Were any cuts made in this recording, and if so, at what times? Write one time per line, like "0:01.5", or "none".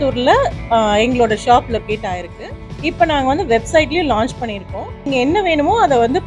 0:02.4
0:05.1